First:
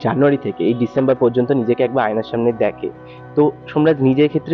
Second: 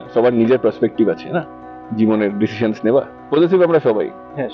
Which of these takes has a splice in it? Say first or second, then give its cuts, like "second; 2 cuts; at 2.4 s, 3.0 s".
second; 1 cut; at 3.2 s